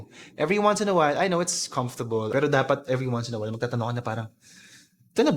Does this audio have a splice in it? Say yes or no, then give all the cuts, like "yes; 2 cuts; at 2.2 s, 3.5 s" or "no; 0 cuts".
yes; 1 cut; at 2.3 s